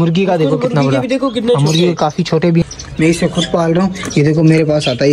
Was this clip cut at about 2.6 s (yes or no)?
yes